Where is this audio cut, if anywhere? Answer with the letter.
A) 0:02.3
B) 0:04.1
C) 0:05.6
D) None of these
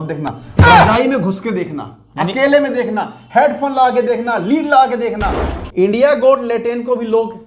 C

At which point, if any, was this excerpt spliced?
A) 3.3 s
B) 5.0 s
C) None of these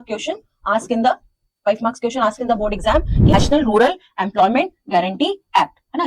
A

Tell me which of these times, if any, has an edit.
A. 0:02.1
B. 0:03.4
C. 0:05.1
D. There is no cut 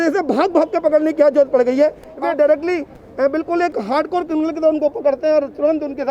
A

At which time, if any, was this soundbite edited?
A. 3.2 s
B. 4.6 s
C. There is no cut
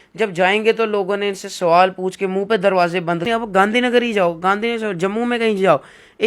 A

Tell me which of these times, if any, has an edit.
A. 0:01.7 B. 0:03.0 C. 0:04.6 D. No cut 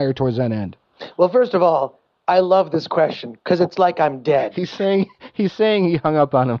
C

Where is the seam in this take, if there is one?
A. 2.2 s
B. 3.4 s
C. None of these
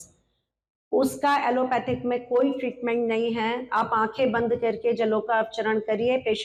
C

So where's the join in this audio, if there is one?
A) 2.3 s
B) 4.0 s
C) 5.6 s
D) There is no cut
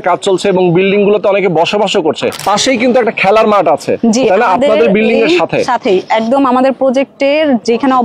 A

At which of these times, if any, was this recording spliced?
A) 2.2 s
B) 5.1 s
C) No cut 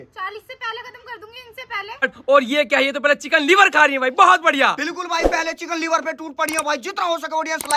A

